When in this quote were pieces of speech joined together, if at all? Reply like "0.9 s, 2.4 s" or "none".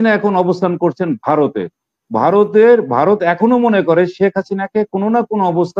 none